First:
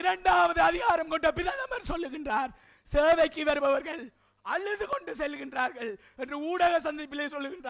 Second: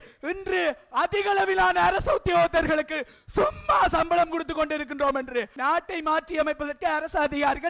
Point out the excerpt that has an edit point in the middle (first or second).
second